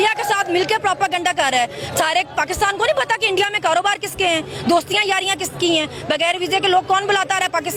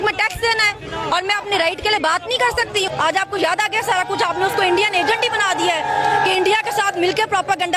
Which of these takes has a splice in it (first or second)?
second